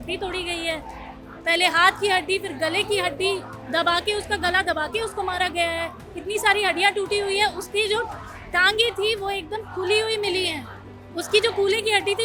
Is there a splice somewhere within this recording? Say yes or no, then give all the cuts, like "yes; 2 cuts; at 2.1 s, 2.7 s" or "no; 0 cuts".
no; 0 cuts